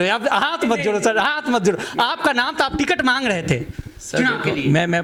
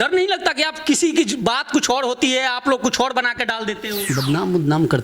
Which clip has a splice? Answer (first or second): second